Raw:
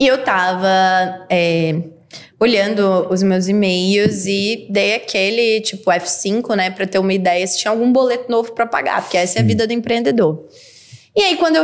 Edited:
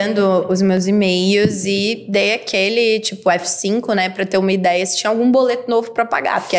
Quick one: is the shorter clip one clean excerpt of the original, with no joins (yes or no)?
yes